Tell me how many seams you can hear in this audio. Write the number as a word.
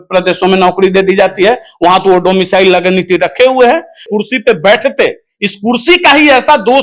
one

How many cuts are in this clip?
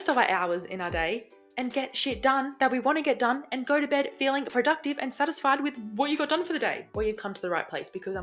one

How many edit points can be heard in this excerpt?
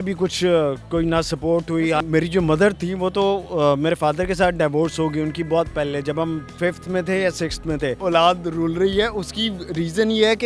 two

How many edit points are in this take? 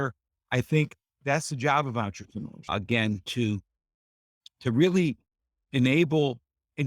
zero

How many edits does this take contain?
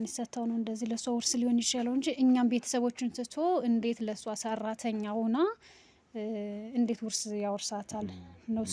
zero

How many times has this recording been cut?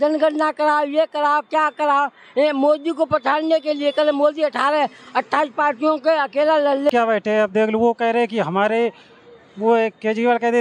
one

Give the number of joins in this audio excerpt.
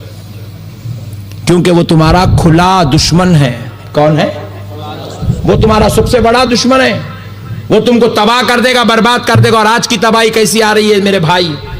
zero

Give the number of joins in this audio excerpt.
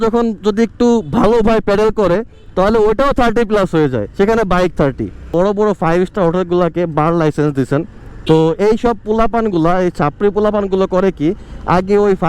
one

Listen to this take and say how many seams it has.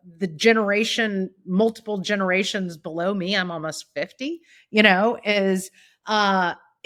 zero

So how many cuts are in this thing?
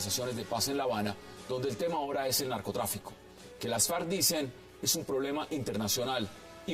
one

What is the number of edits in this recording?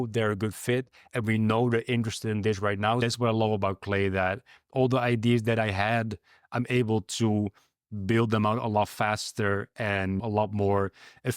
two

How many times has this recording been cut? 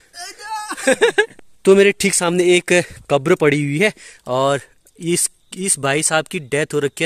one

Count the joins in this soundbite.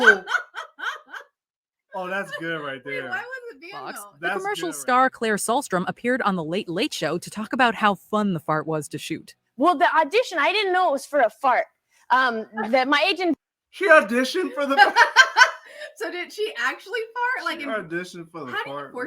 one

